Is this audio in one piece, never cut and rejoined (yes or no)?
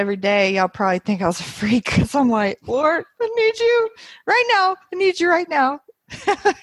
yes